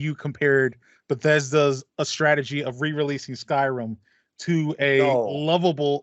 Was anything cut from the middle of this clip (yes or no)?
no